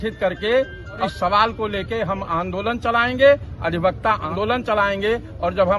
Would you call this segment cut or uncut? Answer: cut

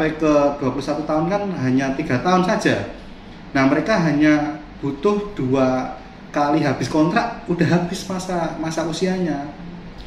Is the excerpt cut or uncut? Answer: uncut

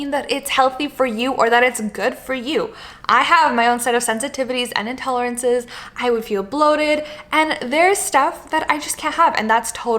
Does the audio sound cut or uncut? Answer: uncut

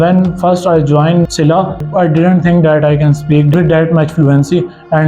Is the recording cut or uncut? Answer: cut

